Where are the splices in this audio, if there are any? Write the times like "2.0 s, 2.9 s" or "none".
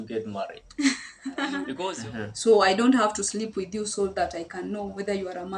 2.0 s